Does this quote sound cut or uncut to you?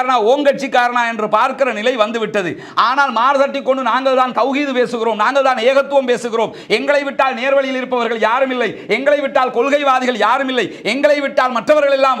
uncut